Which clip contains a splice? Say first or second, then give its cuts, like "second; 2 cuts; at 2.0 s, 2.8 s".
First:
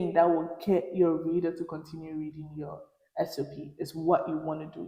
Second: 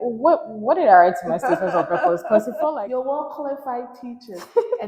second; 1 cut; at 2.5 s